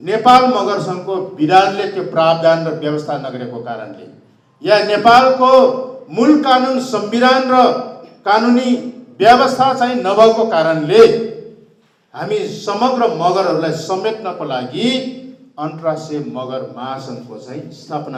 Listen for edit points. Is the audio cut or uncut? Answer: uncut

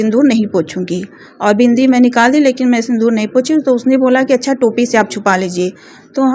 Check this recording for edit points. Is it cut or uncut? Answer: uncut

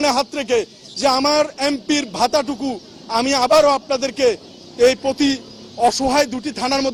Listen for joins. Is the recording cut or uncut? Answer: uncut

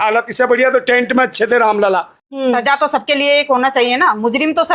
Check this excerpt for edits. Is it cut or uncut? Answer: cut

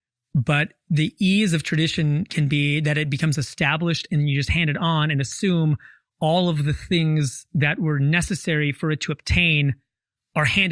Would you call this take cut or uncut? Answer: uncut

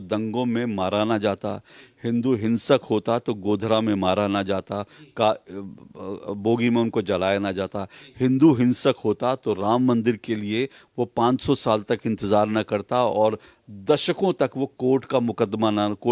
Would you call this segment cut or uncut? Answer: uncut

